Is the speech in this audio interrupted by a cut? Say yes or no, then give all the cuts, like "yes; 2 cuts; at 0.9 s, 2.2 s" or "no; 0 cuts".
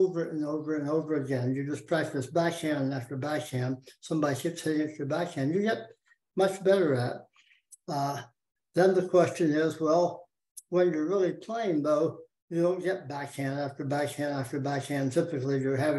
no; 0 cuts